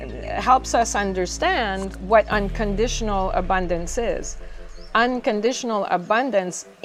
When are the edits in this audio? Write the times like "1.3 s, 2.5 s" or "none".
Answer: none